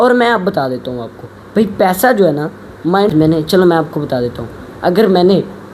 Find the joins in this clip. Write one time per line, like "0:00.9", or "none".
0:03.1